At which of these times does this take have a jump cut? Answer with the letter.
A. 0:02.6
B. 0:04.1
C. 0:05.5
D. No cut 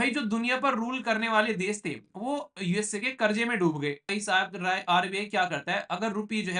B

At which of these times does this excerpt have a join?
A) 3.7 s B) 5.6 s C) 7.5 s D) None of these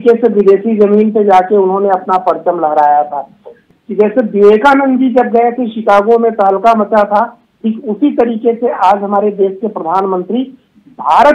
A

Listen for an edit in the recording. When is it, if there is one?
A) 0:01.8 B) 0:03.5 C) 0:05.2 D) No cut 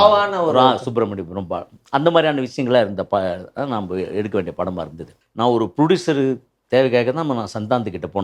C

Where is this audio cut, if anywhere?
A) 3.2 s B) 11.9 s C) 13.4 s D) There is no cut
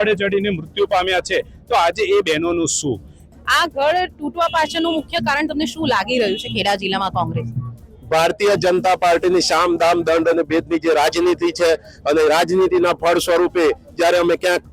A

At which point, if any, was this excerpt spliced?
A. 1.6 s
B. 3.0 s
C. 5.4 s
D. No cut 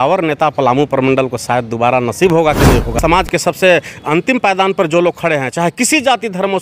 B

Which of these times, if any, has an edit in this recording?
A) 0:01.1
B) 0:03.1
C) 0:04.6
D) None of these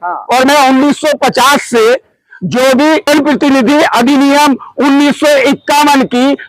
B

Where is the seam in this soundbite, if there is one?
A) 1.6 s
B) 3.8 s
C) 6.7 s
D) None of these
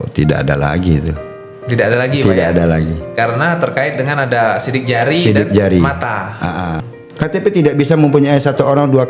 C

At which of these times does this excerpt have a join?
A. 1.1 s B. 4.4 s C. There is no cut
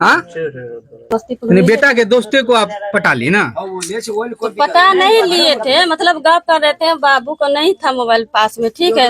A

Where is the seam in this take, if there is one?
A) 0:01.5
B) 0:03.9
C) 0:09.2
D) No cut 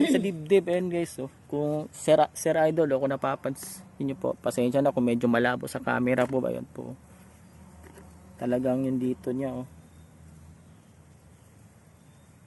D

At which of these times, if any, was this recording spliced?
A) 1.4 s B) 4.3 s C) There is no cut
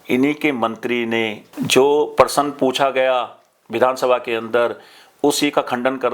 A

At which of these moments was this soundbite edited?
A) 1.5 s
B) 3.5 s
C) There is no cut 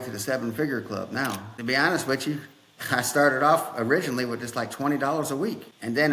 A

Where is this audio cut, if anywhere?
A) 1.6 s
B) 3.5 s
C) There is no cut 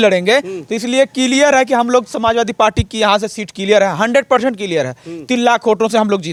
C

